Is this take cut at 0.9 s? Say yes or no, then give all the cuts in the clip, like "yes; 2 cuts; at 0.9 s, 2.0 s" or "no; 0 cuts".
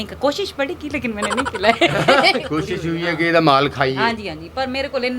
no; 1 cut; at 2.4 s